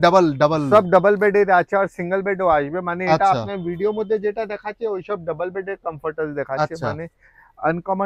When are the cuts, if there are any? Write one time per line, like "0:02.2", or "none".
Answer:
none